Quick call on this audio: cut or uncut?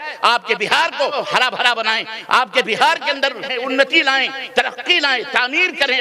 cut